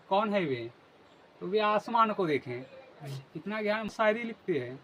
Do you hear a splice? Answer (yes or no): yes